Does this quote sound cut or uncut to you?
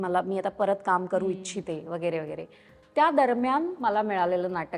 uncut